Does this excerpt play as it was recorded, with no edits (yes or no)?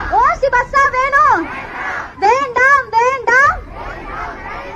yes